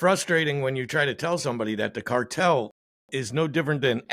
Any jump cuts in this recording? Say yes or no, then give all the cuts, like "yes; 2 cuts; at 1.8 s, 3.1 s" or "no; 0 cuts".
no; 0 cuts